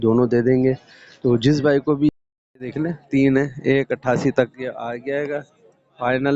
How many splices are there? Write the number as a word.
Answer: one